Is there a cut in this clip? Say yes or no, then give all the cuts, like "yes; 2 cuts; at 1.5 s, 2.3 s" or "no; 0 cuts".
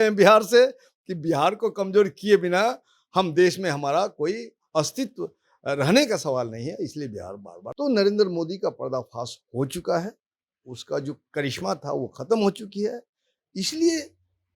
yes; 1 cut; at 7.6 s